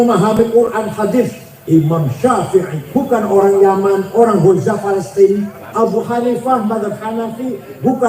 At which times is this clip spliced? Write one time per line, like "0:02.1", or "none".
0:02.8
0:05.6